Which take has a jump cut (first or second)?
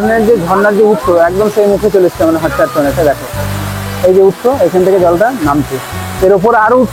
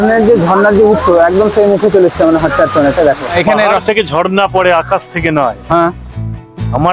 second